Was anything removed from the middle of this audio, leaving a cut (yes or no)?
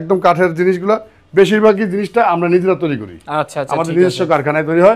no